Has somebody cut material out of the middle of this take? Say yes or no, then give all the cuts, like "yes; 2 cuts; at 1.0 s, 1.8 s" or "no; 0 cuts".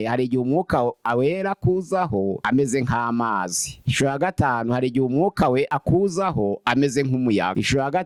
no; 0 cuts